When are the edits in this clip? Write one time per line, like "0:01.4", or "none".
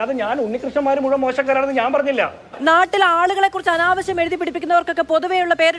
0:02.6